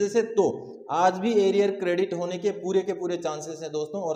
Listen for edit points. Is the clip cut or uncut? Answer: uncut